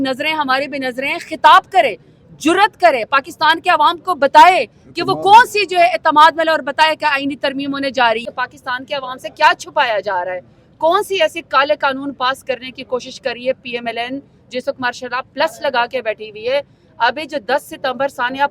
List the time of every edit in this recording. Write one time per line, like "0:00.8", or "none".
0:08.2